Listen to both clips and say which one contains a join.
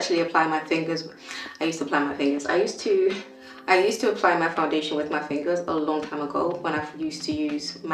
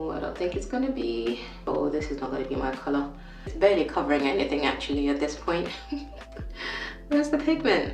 second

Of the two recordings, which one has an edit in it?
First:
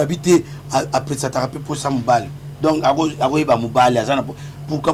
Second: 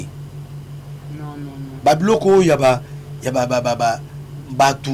second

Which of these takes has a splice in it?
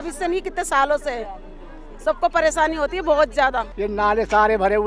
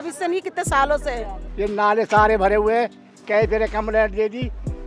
second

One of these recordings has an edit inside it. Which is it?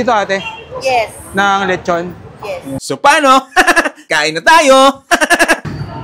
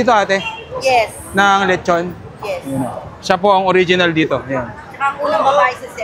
first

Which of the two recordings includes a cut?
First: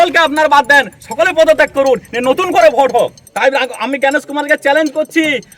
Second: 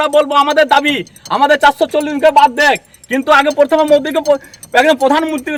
first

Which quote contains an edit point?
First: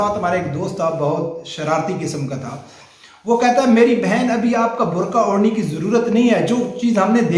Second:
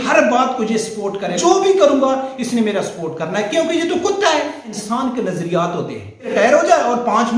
second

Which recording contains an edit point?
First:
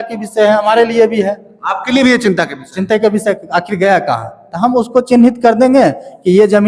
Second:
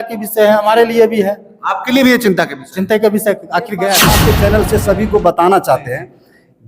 second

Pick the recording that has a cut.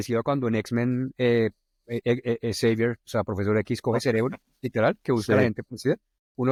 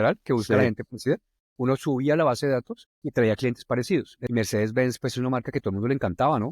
second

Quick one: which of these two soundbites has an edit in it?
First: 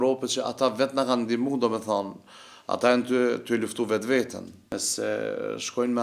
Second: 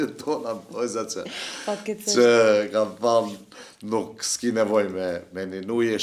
first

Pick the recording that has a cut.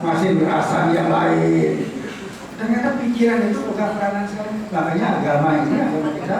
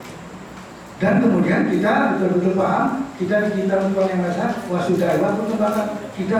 first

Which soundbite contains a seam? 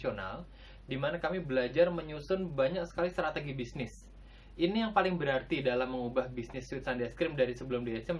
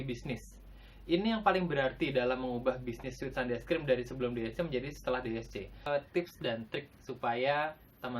second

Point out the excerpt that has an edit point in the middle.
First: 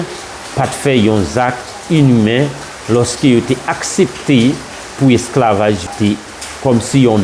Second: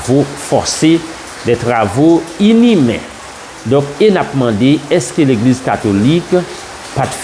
first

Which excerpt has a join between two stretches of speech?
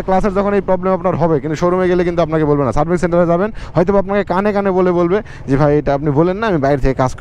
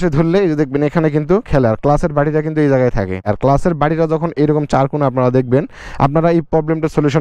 second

